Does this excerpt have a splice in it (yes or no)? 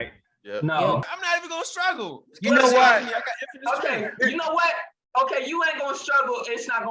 yes